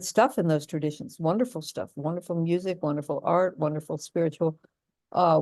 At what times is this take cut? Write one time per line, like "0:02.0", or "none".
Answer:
none